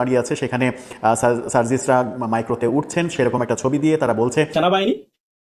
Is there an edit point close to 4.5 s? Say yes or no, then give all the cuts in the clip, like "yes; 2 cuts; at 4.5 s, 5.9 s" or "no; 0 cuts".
yes; 1 cut; at 4.5 s